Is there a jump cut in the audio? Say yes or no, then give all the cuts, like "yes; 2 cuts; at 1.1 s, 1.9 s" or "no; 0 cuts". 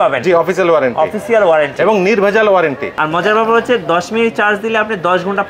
yes; 1 cut; at 2.9 s